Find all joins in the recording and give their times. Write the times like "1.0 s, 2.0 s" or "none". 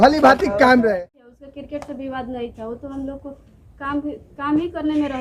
1.1 s

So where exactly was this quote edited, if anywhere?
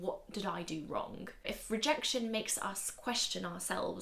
1.3 s

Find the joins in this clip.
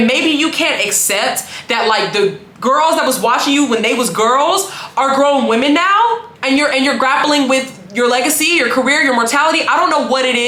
none

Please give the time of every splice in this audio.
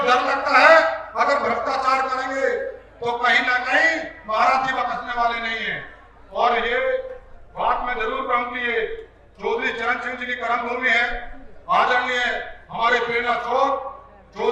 none

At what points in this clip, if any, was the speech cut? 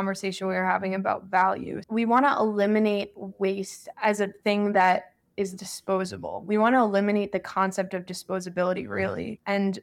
1.8 s

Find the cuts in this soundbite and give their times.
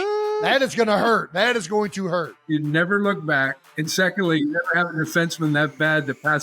2.3 s

